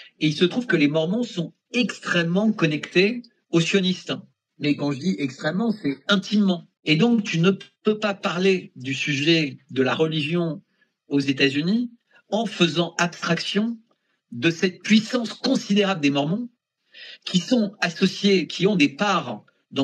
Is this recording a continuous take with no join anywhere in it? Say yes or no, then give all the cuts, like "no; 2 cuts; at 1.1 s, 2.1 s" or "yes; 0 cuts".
no; 1 cut; at 6.7 s